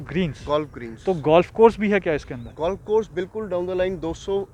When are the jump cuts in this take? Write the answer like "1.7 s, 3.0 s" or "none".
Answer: none